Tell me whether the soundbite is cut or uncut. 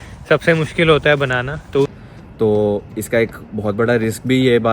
cut